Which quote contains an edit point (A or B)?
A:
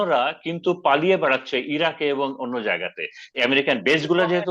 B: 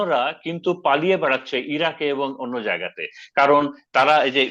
A